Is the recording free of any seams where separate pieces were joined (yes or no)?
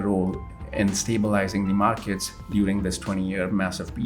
no